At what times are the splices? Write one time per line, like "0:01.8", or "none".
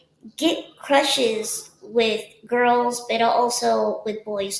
none